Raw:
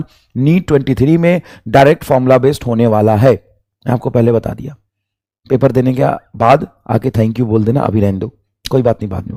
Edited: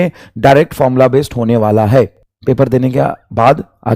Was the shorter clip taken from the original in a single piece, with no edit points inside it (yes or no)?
no